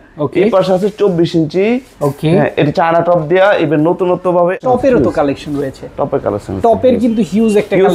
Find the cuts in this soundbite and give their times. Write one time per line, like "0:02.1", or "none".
0:04.6